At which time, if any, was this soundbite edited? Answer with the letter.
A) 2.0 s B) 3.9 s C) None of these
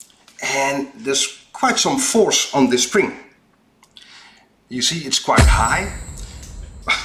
C